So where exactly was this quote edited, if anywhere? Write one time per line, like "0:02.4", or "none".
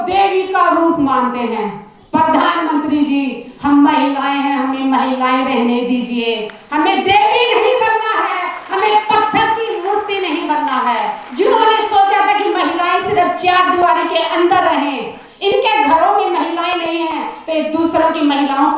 0:11.2